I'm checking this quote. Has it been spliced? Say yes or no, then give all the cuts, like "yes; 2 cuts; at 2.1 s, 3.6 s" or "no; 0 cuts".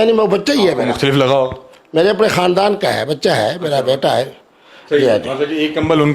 no; 0 cuts